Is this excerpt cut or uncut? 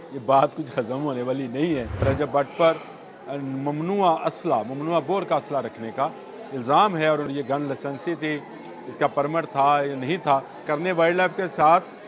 cut